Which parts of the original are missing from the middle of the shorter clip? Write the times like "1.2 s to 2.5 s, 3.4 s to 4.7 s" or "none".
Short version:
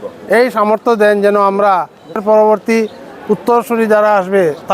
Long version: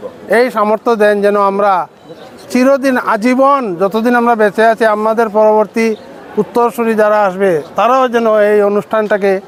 2.2 s to 5.3 s